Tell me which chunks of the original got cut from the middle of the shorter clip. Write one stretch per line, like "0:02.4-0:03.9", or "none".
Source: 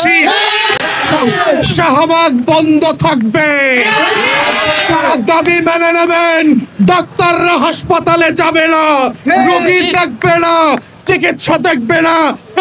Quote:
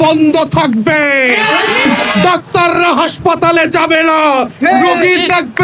0:04.5-0:06.6